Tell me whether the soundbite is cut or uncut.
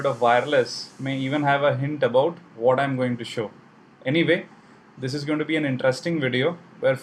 uncut